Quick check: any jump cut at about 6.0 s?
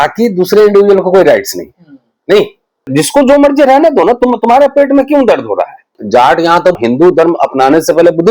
yes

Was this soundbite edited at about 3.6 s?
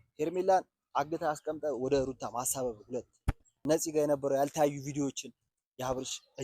yes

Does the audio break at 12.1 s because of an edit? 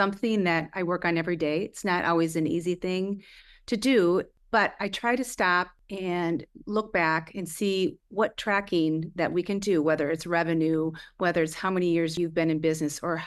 yes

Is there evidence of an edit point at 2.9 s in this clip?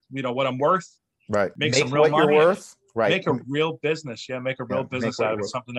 no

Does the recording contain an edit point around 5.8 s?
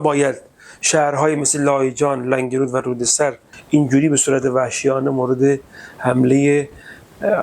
no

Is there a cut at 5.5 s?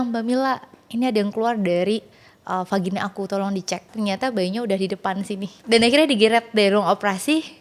yes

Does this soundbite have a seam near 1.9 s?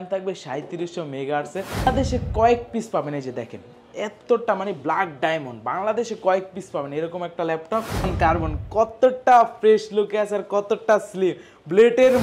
yes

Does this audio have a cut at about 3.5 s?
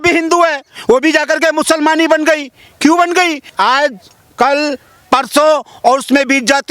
yes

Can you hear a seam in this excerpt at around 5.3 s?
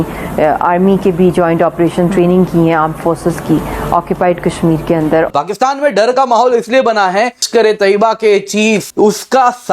yes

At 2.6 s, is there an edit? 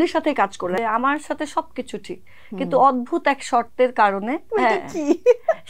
no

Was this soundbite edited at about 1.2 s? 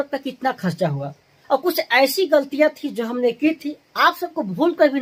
no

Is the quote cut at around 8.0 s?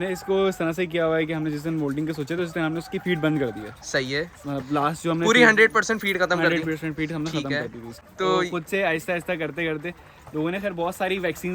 yes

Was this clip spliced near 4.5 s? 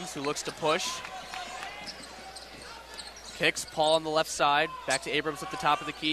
no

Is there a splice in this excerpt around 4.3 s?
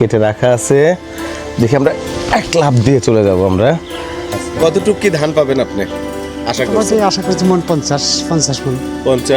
yes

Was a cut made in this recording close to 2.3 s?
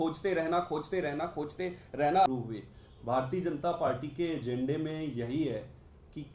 yes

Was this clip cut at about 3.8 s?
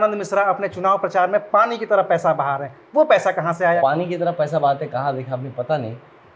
yes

